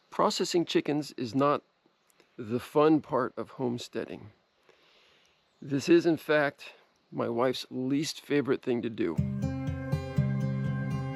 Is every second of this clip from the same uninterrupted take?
no; 1 cut; at 9.1 s

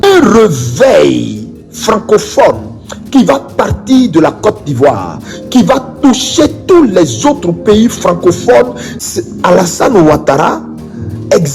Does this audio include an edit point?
yes; 1 cut; at 8.9 s

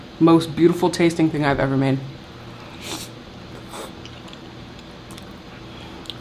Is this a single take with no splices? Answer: yes; 0 cuts

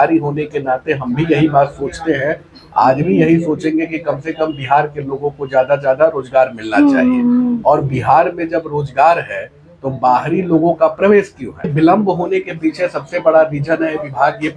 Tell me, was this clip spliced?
yes; 1 cut; at 11.7 s

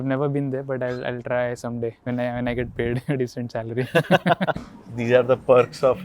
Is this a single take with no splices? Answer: no; 2 cuts; at 2.0 s, 4.6 s

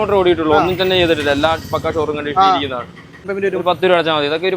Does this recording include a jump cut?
yes; 1 cut; at 3.3 s

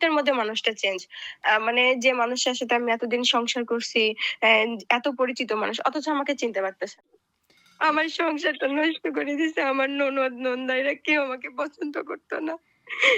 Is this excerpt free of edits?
no; 1 cut; at 7.1 s

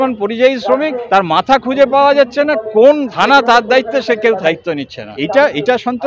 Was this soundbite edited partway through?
yes; 1 cut; at 5.0 s

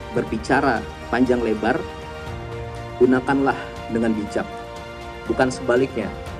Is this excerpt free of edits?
yes; 0 cuts

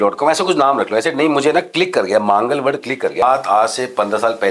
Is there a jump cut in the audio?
yes; 1 cut; at 3.2 s

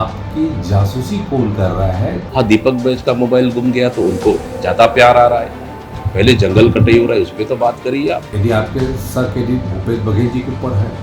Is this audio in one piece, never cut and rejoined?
no; 2 cuts; at 2.2 s, 8.3 s

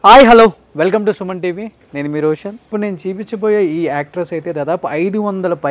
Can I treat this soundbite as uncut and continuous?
no; 1 cut; at 2.6 s

